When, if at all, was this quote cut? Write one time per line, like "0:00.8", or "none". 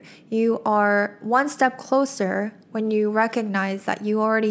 none